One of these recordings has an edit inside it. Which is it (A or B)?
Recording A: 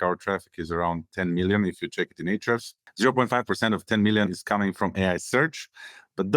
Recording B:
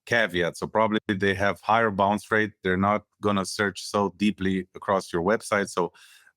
A